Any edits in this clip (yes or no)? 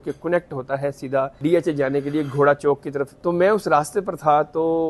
yes